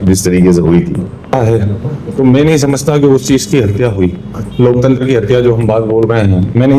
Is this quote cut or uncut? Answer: cut